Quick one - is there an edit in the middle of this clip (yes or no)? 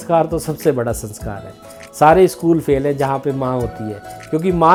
no